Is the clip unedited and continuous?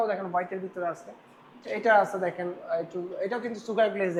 yes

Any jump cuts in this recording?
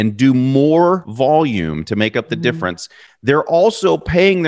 yes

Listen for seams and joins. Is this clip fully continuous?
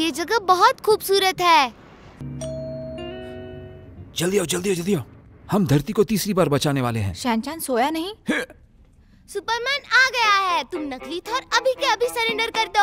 no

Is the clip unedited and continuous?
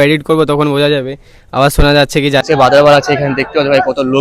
no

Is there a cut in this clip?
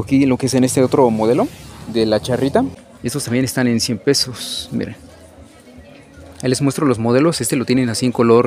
yes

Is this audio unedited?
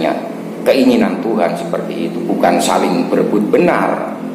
yes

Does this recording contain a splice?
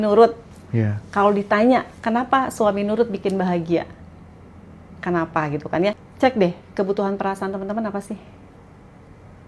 yes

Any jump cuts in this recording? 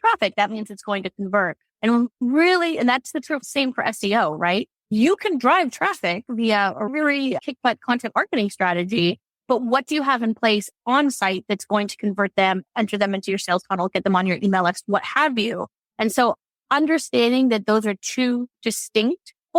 no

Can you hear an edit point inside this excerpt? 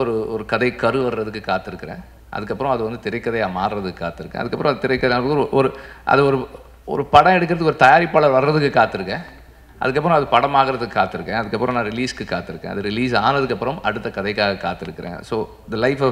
no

